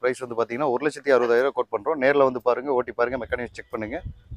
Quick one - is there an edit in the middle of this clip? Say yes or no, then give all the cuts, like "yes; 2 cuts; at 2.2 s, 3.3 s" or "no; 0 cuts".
no; 0 cuts